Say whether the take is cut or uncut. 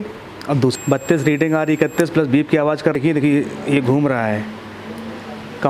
cut